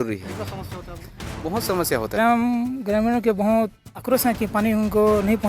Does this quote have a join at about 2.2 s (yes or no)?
yes